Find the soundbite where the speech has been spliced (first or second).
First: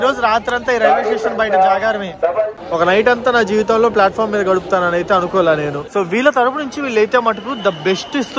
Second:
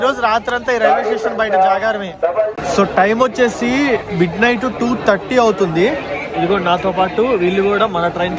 first